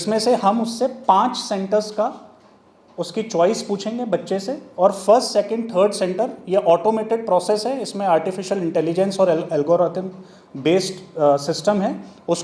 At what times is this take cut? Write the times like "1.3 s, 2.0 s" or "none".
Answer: none